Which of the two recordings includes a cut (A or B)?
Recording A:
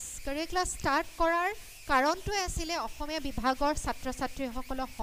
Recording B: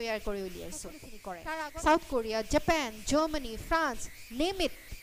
B